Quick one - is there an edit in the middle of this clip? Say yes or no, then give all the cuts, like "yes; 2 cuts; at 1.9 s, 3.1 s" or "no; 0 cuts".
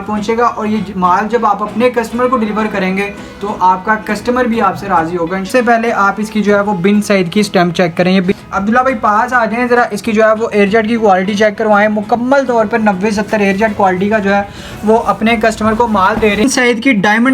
yes; 3 cuts; at 5.5 s, 8.3 s, 16.4 s